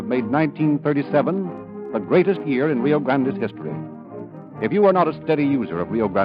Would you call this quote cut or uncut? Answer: uncut